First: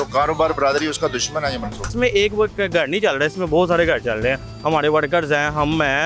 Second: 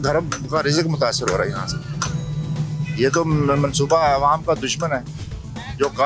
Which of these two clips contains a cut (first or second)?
first